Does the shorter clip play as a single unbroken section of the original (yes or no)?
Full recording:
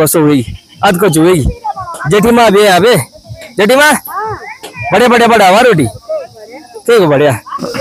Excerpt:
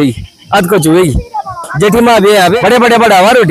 no